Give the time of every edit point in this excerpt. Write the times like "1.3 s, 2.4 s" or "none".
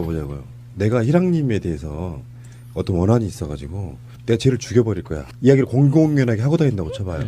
1.7 s